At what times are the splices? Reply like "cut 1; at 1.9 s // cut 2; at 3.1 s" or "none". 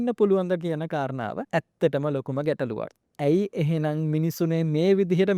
cut 1; at 1.4 s // cut 2; at 3.0 s